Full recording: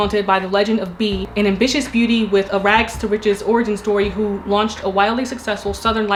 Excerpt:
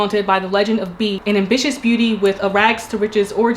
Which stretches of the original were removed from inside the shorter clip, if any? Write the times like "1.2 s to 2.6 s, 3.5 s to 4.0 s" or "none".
1.2 s to 1.3 s